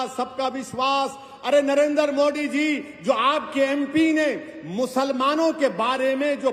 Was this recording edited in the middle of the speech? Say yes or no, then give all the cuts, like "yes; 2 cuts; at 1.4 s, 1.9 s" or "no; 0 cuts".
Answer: no; 0 cuts